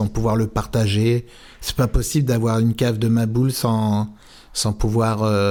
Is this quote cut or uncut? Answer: uncut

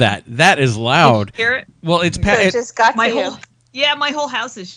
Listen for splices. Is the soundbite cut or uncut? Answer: cut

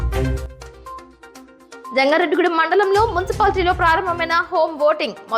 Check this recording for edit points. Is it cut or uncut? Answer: cut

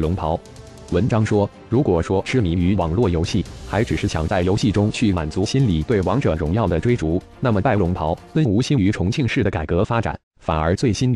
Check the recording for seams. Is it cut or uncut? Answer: uncut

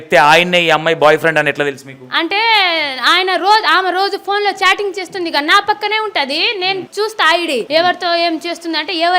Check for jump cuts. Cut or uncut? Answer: cut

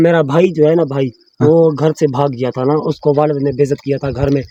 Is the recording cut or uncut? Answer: uncut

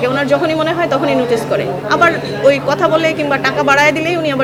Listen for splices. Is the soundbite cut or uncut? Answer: uncut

